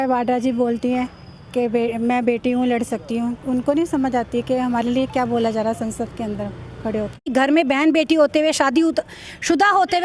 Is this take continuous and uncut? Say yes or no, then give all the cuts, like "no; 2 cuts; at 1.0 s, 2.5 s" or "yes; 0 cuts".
no; 1 cut; at 7.3 s